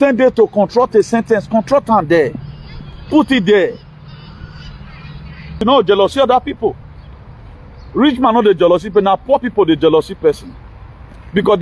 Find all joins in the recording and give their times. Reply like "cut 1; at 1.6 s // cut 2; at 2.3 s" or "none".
cut 1; at 5.6 s